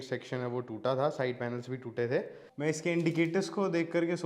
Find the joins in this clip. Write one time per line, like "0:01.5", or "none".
0:02.4